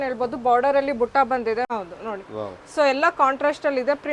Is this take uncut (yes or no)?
no